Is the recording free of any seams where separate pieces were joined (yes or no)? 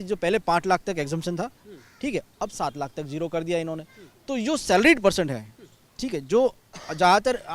yes